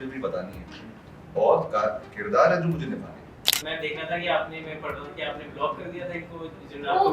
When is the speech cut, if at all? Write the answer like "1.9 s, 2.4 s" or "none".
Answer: 3.6 s